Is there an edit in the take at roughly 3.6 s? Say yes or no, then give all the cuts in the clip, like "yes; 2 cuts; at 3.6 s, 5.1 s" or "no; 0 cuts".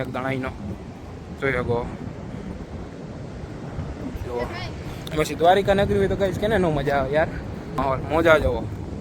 no; 1 cut; at 7.7 s